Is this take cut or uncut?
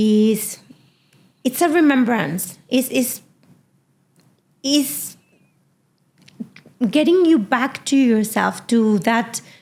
uncut